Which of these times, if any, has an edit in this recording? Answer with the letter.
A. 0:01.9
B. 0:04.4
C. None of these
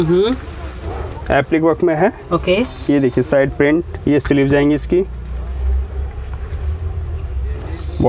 C